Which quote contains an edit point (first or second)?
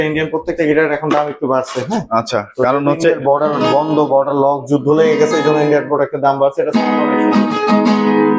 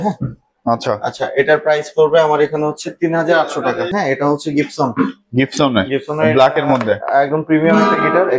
second